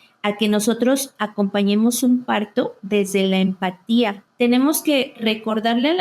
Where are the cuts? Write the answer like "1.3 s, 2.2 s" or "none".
4.2 s